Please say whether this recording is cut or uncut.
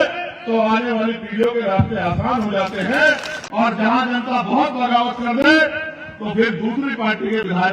cut